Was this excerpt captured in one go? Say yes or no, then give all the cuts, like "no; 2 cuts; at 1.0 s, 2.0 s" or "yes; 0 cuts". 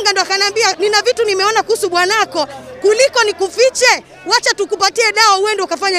yes; 0 cuts